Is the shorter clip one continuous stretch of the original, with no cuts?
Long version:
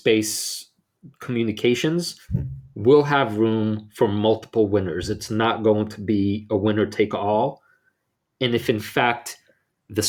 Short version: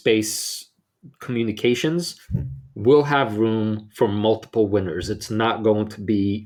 yes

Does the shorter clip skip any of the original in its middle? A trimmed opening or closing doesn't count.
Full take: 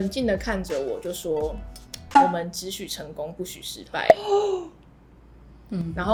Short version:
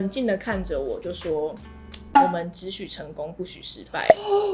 no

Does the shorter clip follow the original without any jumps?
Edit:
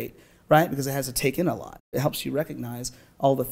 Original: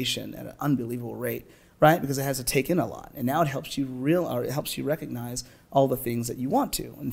no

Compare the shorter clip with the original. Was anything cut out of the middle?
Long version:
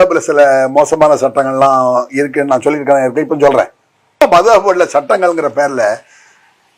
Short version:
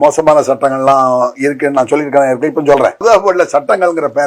yes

